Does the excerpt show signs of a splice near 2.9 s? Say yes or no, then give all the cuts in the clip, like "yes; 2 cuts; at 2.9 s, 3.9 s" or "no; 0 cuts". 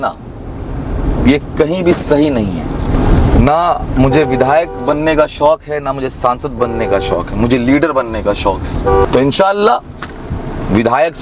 yes; 2 cuts; at 2.9 s, 9.0 s